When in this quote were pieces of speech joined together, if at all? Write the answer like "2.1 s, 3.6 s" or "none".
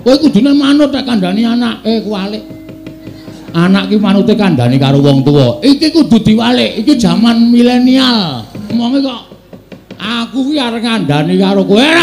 8.7 s